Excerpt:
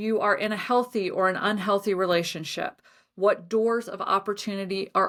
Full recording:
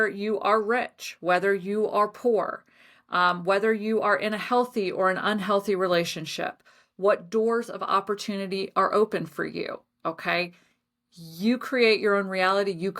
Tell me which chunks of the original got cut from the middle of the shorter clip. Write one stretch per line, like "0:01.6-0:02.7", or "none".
none